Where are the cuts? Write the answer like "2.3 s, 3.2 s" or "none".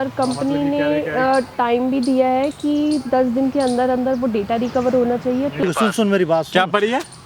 5.6 s